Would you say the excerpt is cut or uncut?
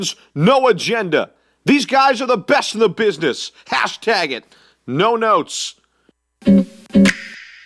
cut